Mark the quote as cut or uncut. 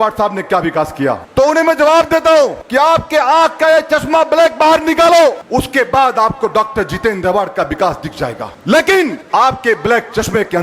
cut